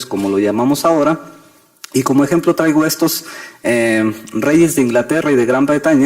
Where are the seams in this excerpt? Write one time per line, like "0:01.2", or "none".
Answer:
0:04.0